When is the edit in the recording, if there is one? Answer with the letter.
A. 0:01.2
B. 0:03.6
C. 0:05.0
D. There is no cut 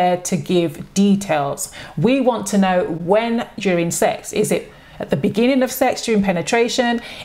B